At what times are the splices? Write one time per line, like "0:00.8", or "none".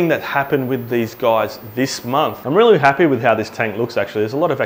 0:02.4